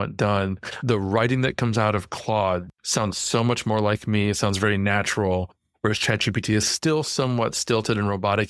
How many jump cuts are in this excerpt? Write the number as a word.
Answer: one